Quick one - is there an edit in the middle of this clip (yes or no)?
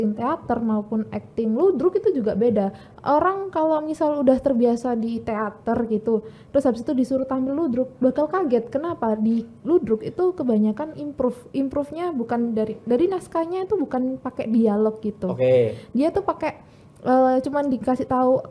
no